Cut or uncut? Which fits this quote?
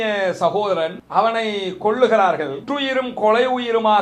cut